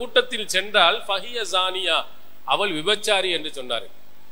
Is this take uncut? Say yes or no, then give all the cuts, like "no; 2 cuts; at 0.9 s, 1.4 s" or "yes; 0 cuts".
yes; 0 cuts